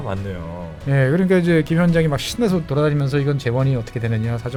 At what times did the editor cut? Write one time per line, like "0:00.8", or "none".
none